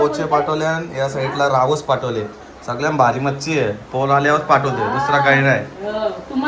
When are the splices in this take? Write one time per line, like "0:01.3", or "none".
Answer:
none